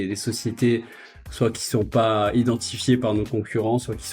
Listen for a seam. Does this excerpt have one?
no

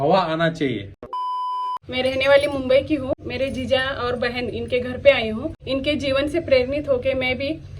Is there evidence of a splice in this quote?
yes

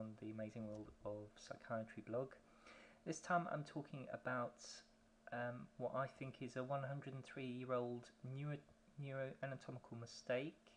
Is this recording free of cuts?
no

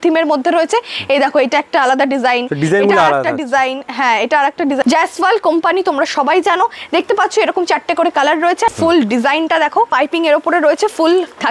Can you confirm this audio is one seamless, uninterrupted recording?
no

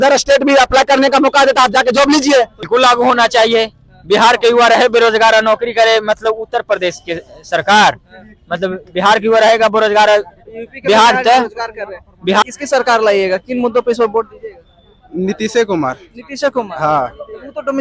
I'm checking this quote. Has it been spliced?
yes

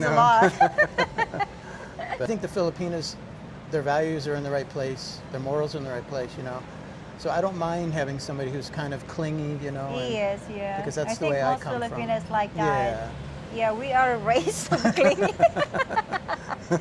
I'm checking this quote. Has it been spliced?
yes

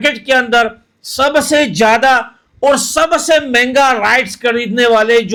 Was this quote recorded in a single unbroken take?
yes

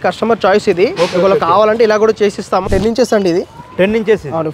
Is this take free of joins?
no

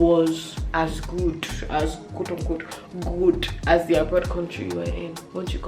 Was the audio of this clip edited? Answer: no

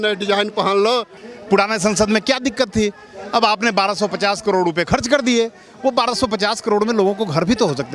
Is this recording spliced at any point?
yes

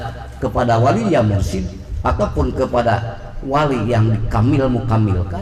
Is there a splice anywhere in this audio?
no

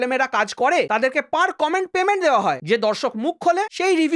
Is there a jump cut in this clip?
yes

